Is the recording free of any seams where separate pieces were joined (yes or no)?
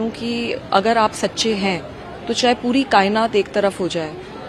yes